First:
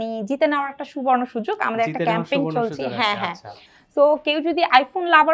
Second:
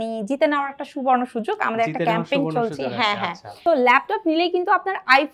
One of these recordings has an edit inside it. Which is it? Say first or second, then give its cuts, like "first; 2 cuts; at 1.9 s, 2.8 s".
second; 1 cut; at 3.5 s